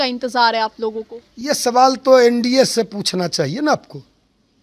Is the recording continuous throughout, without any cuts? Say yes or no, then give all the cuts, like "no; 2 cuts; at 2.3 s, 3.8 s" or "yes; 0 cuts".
yes; 0 cuts